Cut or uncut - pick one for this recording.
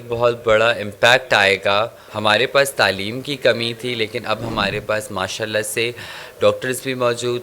cut